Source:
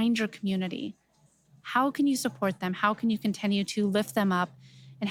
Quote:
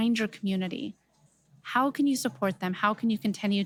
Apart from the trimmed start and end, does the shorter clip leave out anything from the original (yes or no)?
no